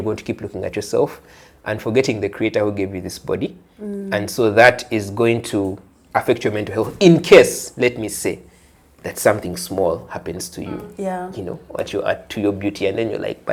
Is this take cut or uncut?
uncut